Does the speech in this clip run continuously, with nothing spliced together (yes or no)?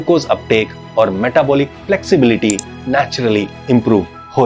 yes